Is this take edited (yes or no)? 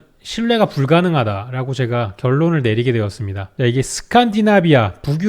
yes